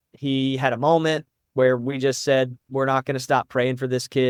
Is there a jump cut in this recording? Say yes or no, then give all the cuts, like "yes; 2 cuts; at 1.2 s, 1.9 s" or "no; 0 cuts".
no; 0 cuts